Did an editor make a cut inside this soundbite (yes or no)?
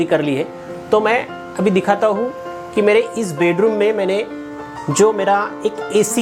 no